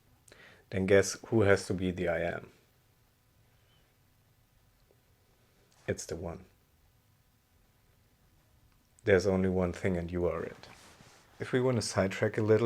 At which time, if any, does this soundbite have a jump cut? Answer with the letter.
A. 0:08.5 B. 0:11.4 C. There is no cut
B